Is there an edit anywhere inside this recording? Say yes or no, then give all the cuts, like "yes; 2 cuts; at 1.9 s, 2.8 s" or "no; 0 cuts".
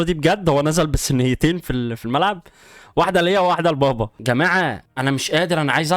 yes; 2 cuts; at 4.2 s, 4.9 s